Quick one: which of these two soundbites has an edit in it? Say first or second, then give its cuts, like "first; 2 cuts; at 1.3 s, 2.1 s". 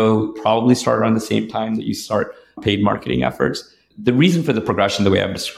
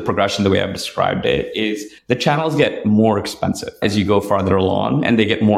second; 2 cuts; at 1.9 s, 3.8 s